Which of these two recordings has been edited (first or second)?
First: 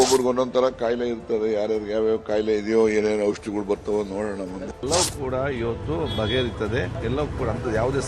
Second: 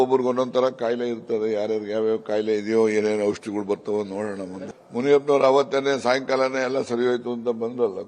first